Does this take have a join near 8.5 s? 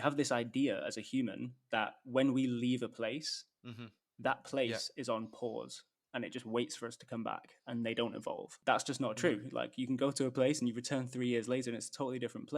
yes; 1 cut; at 8.5 s

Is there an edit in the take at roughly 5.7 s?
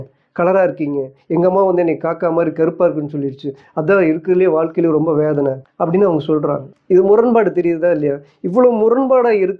yes; 2 cuts; at 5.7 s, 6.7 s

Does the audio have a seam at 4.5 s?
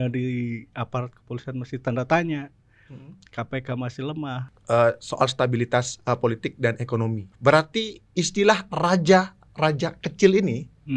yes; 2 cuts; at 4.5 s, 7.3 s

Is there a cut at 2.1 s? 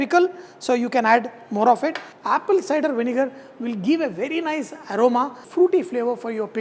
yes; 2 cuts; at 2.1 s, 5.4 s

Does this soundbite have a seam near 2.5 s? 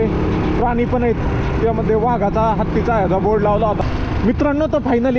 no; 1 cut; at 3.8 s

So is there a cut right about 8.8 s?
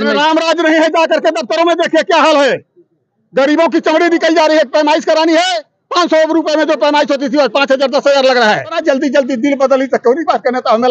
yes; 1 cut; at 8.8 s

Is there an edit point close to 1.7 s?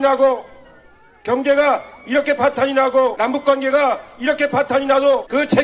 no; 0 cuts

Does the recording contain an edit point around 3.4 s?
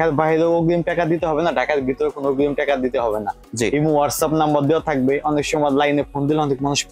no; 0 cuts

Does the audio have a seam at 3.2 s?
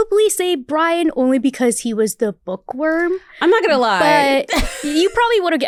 no; 0 cuts

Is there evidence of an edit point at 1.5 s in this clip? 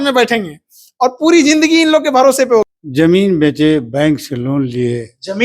no; 1 cut; at 2.8 s

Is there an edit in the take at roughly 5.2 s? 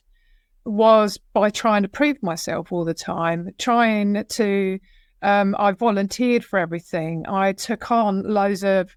no; 0 cuts

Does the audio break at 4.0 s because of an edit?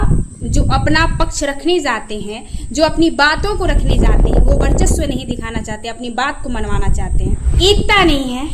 no; 1 cut; at 7.5 s

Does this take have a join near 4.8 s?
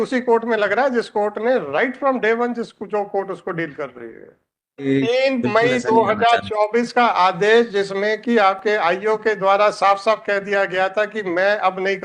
yes; 1 cut; at 4.8 s

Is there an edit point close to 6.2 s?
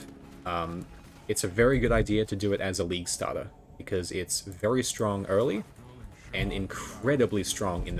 no; 0 cuts

